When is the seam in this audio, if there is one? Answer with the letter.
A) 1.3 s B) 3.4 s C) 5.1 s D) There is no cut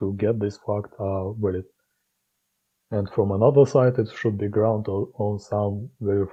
D